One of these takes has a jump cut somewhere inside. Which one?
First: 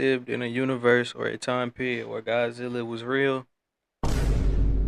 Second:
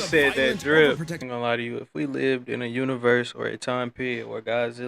second; 1 cut; at 1.2 s

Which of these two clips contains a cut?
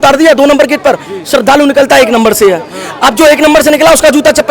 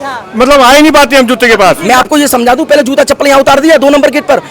second; 1 cut; at 1.8 s

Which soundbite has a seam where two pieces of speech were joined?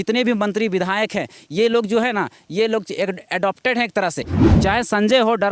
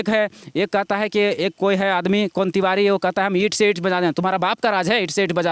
first; 1 cut; at 4.4 s

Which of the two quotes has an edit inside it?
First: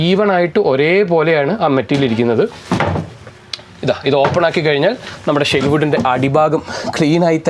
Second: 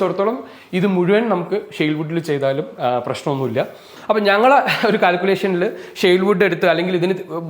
second; 1 cut; at 3.9 s

